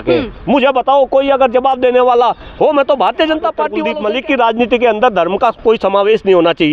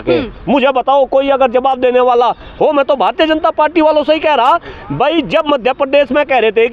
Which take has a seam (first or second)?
first